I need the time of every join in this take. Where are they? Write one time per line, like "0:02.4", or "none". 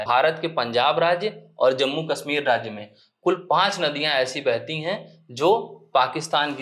none